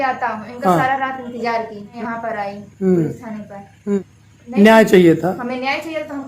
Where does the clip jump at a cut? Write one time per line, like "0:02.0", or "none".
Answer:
0:01.9
0:04.0